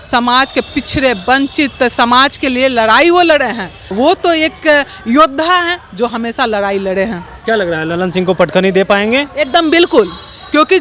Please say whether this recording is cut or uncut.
cut